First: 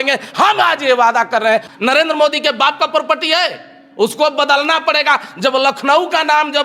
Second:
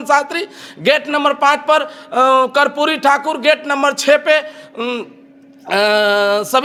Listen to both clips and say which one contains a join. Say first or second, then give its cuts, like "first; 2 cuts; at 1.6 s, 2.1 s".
first; 1 cut; at 1.7 s